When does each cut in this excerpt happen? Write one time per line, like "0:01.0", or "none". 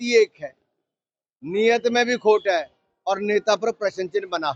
none